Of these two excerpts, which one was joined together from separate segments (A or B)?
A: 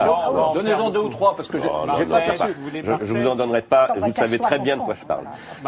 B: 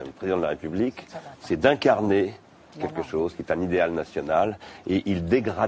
B